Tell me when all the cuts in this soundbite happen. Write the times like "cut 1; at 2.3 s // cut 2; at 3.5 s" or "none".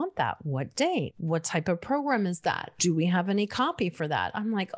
cut 1; at 1.2 s // cut 2; at 2.8 s